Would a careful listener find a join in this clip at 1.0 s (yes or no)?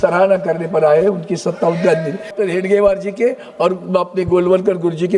no